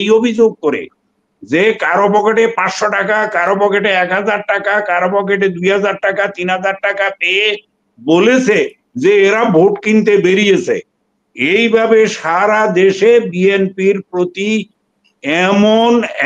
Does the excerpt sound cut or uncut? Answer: uncut